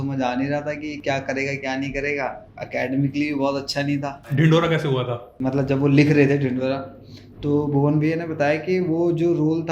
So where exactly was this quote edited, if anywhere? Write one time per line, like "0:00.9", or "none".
0:02.5
0:04.2
0:05.3